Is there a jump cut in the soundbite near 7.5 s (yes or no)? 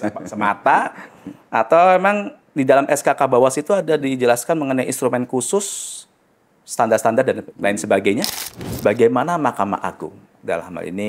yes